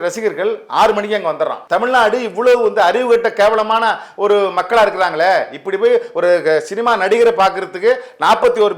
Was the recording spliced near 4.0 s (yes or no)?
no